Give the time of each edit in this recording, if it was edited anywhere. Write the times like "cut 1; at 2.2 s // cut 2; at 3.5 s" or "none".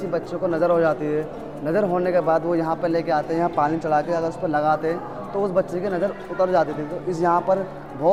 none

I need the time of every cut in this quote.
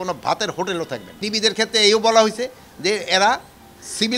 cut 1; at 1.3 s

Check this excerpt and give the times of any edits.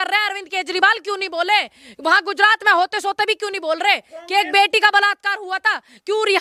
none

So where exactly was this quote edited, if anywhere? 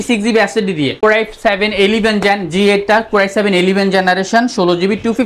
cut 1; at 1.0 s

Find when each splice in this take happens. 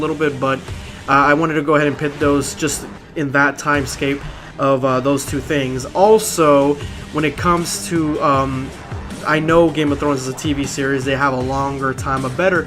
cut 1; at 8.7 s

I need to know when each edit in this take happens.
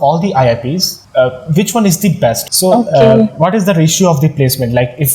cut 1; at 0.9 s // cut 2; at 2.5 s

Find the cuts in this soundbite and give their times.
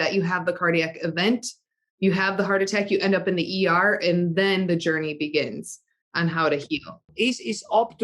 cut 1; at 7.1 s

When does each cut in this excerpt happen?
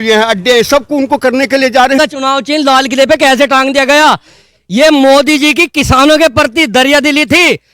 cut 1; at 2.0 s

